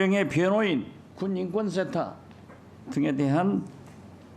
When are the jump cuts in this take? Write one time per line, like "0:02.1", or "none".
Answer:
0:01.0